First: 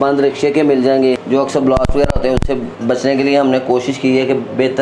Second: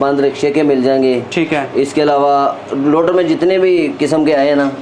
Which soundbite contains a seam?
first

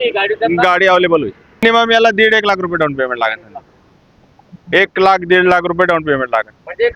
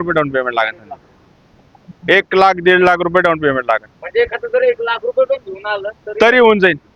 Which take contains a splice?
first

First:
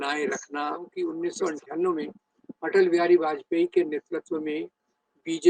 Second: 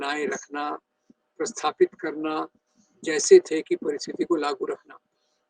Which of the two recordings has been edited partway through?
first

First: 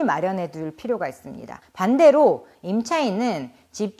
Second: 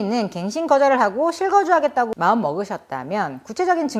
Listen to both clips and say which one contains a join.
first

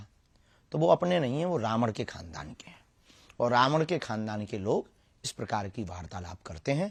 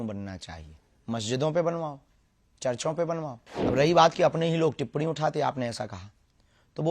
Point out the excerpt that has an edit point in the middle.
second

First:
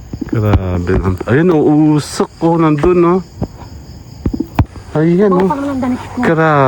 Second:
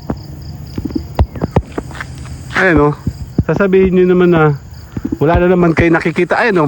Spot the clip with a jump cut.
first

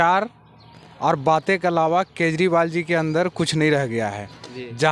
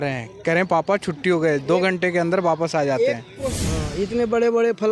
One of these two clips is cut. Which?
second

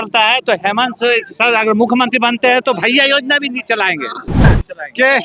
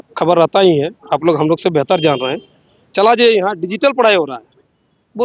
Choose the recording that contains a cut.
first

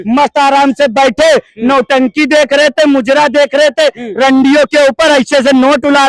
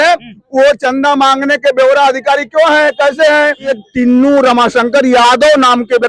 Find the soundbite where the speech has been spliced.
second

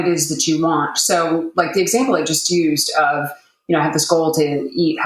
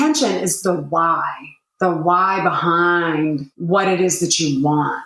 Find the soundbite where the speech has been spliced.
second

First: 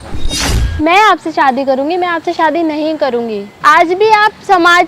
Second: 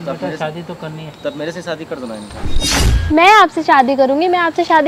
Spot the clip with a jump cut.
first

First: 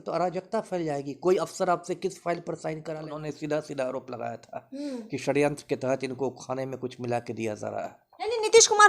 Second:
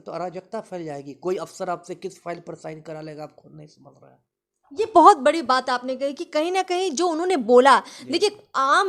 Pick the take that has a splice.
first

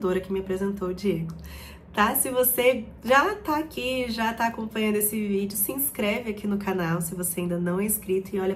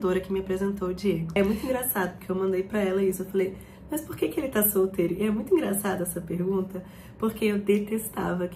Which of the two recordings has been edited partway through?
second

